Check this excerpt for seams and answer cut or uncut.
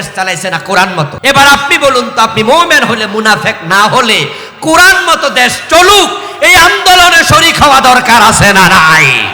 cut